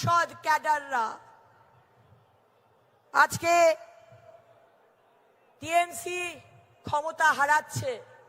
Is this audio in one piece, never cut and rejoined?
yes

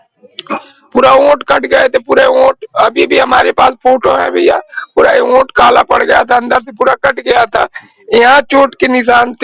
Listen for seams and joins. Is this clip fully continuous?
yes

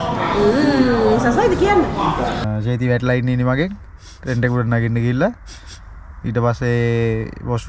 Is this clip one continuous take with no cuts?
no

